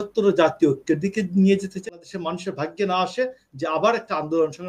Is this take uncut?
no; 1 cut; at 1.8 s

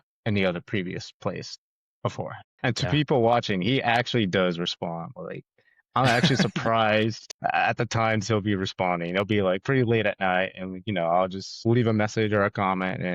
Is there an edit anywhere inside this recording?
yes; 1 cut; at 2.4 s

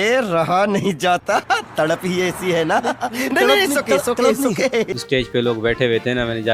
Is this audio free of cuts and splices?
no; 1 cut; at 5.0 s

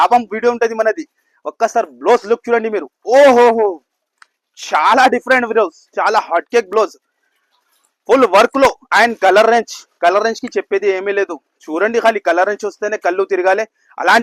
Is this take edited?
no; 0 cuts

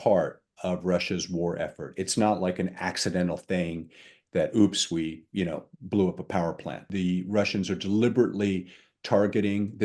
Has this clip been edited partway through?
yes; 1 cut; at 6.9 s

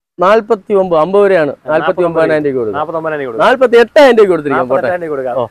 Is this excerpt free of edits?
yes; 0 cuts

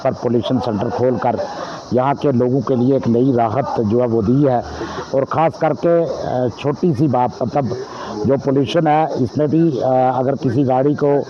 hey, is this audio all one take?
yes; 0 cuts

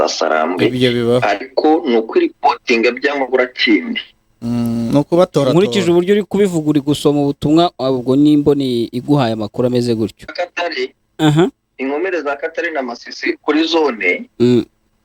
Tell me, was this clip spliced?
yes; 1 cut; at 10.3 s

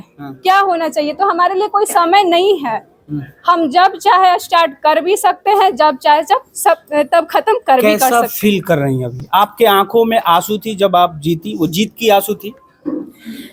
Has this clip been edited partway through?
no; 0 cuts

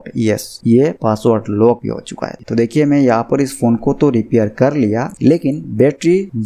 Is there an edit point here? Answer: yes; 1 cut; at 2.4 s

